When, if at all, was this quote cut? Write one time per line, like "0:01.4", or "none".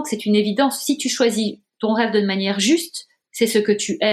none